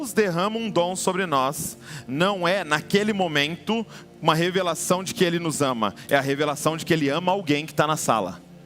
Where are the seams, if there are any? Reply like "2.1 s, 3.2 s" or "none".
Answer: none